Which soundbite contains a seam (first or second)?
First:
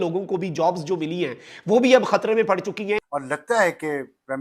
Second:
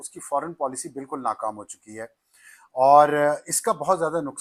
first